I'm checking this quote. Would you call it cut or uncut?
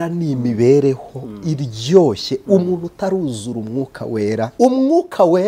cut